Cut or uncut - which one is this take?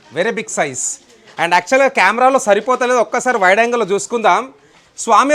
uncut